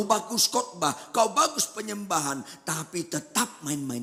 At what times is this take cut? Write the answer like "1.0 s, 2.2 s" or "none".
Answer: none